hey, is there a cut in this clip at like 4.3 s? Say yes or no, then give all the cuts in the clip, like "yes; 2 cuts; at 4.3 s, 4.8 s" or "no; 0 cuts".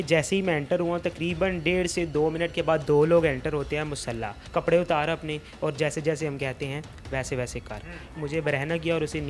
yes; 2 cuts; at 4.3 s, 8.0 s